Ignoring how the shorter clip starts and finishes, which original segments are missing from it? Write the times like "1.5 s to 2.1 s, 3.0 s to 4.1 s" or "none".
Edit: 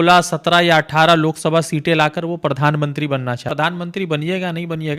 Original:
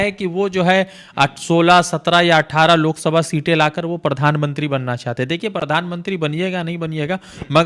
5.1 s to 5.6 s